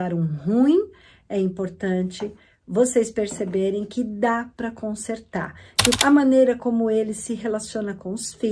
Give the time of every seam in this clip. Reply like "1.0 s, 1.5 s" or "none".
6.0 s